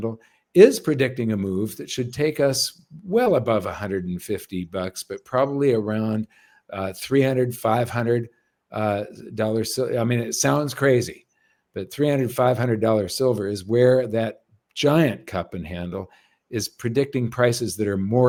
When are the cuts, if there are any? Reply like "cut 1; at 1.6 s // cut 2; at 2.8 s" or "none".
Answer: none